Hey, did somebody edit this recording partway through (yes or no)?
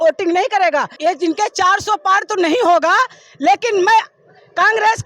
yes